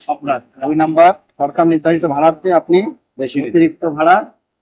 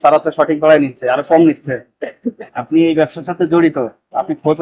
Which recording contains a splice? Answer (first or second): second